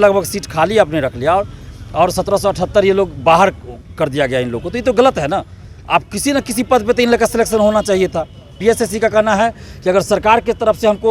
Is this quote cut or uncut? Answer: cut